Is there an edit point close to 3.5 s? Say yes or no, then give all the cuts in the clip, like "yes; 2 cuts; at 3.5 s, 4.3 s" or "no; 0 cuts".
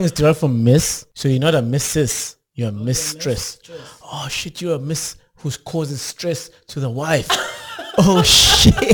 no; 1 cut; at 1.0 s